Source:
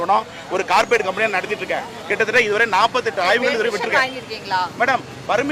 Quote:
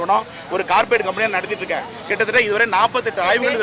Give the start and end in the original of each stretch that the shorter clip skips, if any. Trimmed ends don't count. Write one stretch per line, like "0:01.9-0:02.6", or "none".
none

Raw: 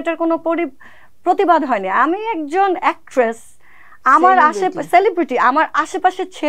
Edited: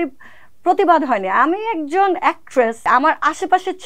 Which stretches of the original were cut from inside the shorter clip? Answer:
0:03.4-0:05.3

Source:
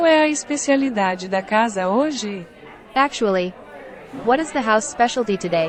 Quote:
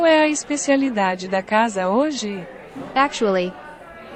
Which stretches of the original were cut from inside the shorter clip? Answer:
none

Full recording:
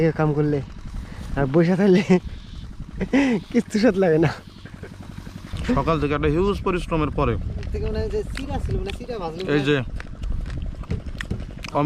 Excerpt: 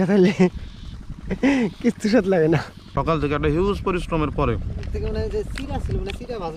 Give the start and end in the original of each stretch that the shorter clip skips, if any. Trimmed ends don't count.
0:04.7-0:05.8

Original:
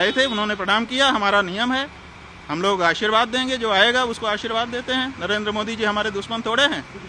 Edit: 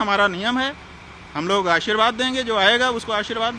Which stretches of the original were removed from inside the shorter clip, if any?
none

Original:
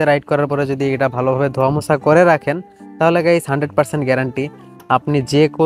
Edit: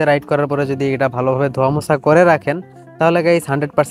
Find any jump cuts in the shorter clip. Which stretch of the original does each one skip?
none

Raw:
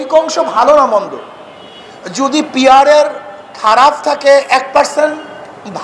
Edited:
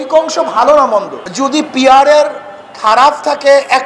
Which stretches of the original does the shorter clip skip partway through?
0:01.2-0:02.0

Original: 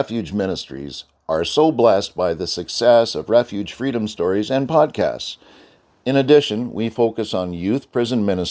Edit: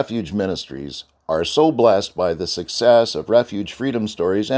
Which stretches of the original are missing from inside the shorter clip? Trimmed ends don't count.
none

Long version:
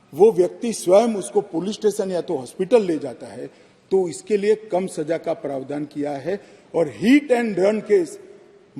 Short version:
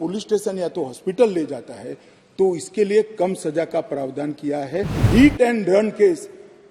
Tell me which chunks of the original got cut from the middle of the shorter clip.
0:06.6-0:06.9

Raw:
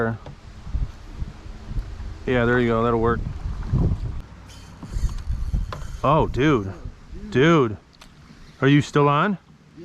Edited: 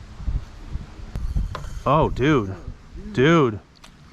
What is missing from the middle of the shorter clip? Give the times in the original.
0:01.6-0:05.3

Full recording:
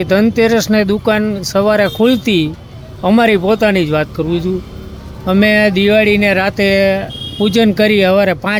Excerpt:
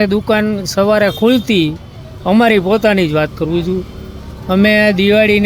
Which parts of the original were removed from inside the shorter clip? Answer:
none

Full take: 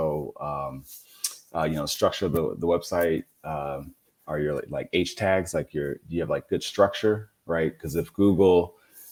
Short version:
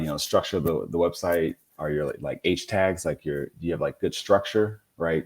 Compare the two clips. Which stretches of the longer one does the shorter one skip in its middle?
0:03.3-0:04.1

